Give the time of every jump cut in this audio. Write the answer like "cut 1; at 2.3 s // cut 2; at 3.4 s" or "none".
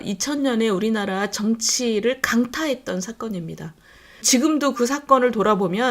cut 1; at 4.2 s